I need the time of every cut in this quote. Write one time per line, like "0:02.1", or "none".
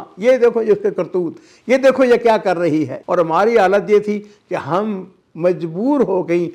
0:03.0